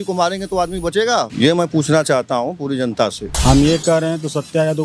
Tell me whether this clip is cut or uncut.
cut